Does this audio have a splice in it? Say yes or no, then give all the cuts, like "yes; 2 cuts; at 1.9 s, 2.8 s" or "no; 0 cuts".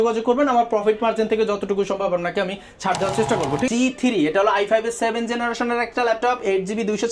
yes; 1 cut; at 3.7 s